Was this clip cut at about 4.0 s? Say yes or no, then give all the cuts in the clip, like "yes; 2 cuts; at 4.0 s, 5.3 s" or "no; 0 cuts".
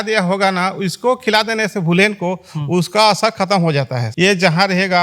yes; 1 cut; at 4.0 s